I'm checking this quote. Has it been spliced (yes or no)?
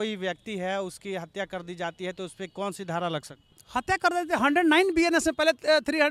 no